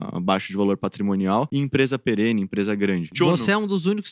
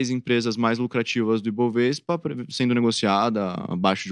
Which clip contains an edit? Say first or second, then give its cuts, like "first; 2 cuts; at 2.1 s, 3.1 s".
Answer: first; 2 cuts; at 1.5 s, 3.1 s